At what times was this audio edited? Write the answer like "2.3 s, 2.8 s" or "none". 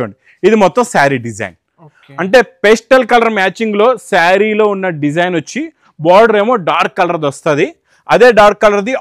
none